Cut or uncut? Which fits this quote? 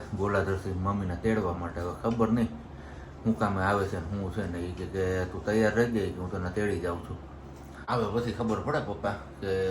cut